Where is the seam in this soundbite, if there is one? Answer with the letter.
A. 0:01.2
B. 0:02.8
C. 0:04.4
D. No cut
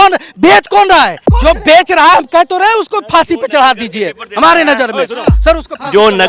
A